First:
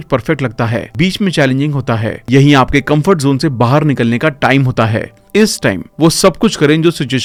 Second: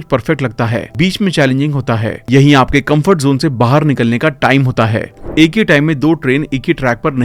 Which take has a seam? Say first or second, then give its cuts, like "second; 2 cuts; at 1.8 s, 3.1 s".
second; 1 cut; at 5.2 s